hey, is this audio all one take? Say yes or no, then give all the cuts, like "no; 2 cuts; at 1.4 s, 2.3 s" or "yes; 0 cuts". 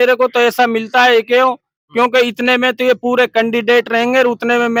yes; 0 cuts